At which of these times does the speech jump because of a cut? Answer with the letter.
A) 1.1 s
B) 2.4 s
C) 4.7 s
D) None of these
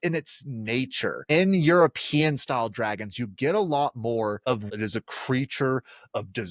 C